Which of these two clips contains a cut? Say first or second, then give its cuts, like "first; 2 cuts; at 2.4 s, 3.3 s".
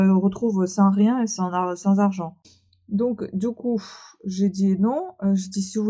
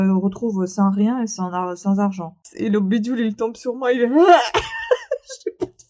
second; 1 cut; at 2.5 s